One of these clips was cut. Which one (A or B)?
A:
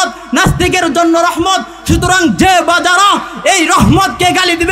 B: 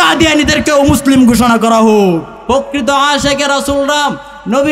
B